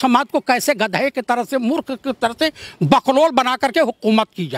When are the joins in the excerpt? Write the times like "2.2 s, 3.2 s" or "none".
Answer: none